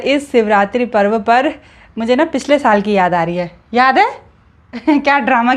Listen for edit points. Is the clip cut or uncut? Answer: uncut